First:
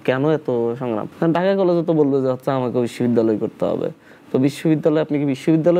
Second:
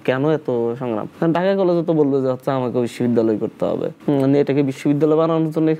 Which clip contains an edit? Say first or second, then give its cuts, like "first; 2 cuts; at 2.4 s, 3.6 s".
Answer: second; 1 cut; at 4.0 s